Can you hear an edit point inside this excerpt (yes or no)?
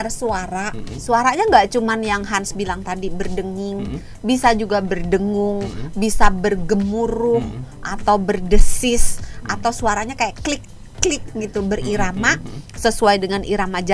no